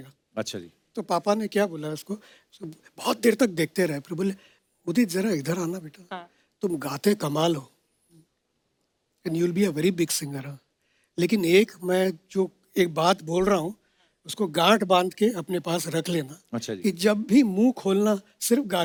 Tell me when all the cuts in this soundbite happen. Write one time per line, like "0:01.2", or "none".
none